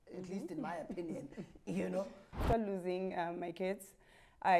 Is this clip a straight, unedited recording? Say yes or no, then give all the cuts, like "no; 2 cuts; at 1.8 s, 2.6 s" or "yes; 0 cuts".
no; 1 cut; at 2.4 s